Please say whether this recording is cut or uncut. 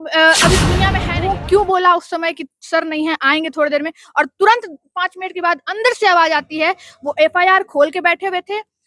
cut